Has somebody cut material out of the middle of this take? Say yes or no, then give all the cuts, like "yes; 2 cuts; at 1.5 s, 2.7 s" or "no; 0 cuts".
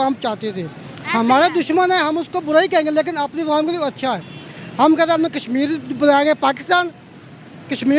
no; 0 cuts